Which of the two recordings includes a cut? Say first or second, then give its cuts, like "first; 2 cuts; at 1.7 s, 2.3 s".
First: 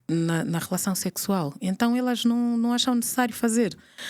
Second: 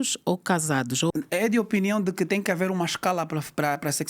second; 1 cut; at 1.1 s